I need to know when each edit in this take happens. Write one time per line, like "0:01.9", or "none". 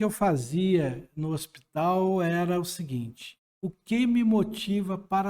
none